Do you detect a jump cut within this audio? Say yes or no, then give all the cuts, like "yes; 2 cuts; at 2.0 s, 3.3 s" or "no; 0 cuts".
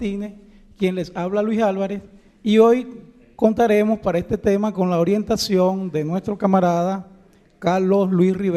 yes; 1 cut; at 7.1 s